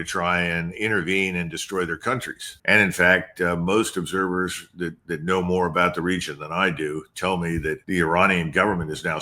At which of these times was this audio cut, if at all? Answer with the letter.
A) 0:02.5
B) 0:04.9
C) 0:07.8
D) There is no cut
A